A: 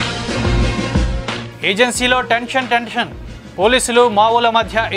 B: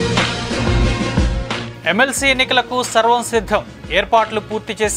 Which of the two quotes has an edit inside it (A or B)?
A